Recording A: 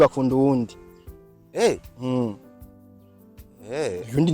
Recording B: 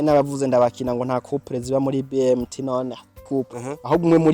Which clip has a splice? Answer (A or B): B